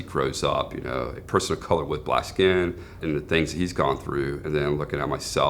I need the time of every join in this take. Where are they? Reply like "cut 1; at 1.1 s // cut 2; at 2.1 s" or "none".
cut 1; at 3.0 s